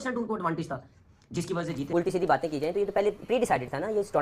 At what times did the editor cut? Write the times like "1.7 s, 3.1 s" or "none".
1.8 s